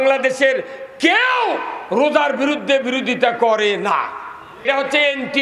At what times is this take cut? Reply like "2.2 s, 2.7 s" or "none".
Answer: 4.5 s